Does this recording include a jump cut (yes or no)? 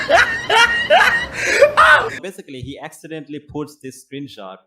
yes